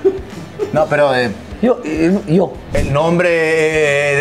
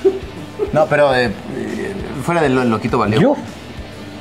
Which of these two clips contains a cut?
first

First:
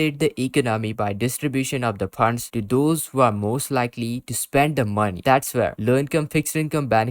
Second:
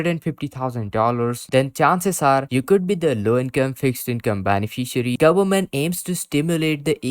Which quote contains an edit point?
second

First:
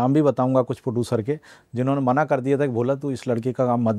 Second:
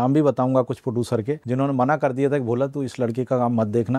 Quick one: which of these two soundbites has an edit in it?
second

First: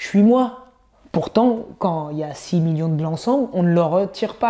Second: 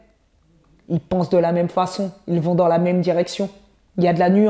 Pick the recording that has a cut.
first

